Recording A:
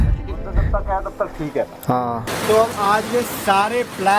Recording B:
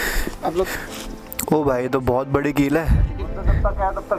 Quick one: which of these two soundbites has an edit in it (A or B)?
A